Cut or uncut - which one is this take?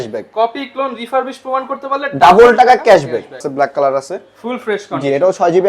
cut